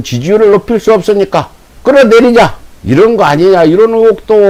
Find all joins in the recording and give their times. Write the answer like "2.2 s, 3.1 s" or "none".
none

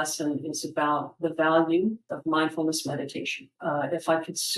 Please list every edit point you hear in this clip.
2.1 s, 3.5 s

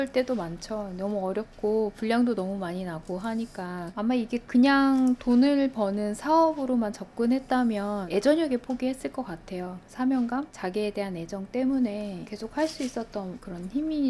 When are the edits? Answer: none

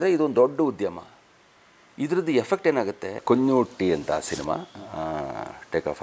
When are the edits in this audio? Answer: 3.2 s

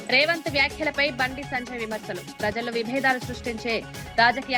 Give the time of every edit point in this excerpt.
none

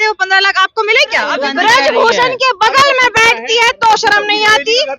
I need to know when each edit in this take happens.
1.4 s

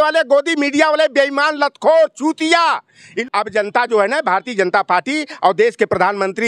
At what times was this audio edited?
3.1 s

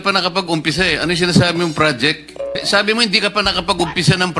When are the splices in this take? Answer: 1.2 s, 2.4 s

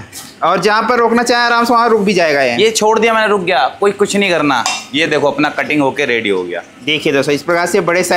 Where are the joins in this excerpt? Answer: none

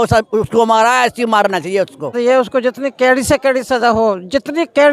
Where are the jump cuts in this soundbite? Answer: 2.1 s

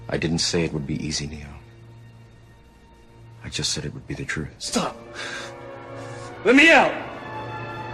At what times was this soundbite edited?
3.3 s

